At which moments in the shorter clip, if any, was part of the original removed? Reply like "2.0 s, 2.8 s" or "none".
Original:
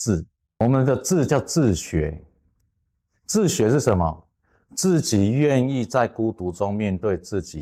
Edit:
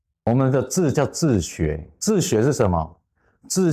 1.9 s

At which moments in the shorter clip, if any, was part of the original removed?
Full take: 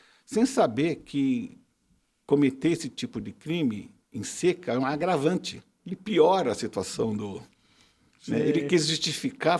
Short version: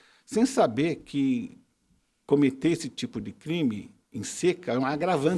none

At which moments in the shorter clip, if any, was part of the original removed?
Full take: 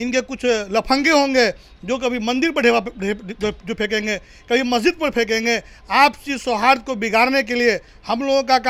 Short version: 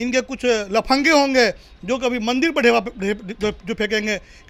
none

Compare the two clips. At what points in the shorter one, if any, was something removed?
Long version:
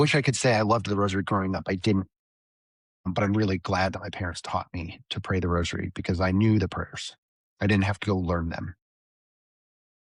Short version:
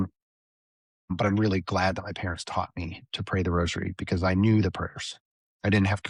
none

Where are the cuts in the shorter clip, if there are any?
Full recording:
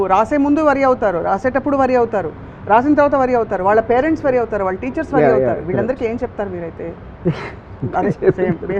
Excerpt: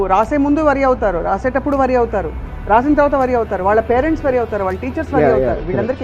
none

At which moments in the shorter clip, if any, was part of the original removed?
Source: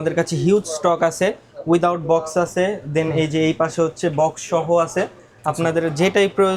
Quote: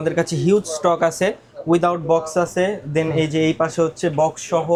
none

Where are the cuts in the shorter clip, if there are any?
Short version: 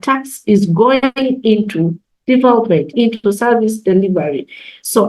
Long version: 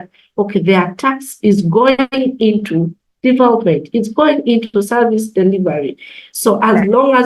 2.9 s

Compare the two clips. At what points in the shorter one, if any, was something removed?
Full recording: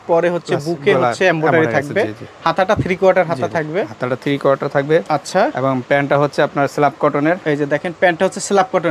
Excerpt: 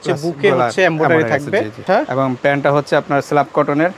1.8 s

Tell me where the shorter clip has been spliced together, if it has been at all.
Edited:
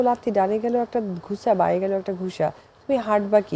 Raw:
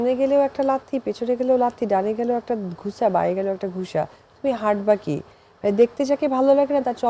none

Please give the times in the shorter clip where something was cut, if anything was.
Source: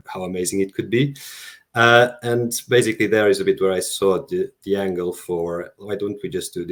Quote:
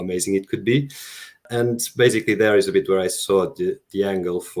1.4 s

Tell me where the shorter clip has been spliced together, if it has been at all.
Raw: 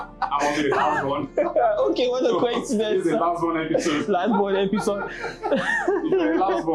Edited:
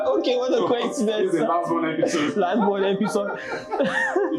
none

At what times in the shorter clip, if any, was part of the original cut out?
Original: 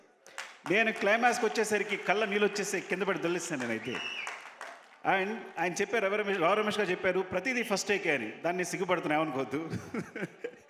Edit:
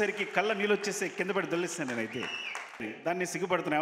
2.9 s

